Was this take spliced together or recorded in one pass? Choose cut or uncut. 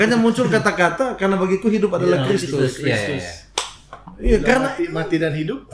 uncut